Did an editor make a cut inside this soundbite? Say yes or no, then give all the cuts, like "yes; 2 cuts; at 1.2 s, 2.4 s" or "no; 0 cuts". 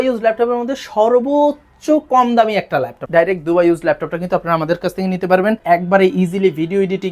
yes; 2 cuts; at 3.0 s, 5.6 s